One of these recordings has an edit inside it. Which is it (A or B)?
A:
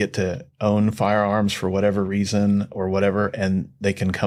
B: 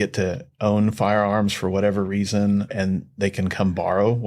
B